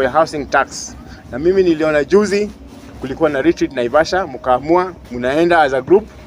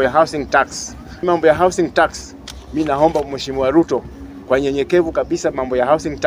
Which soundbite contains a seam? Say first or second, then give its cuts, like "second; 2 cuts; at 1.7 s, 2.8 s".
second; 1 cut; at 1.1 s